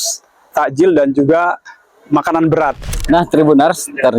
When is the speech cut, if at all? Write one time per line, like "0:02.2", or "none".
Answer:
0:02.8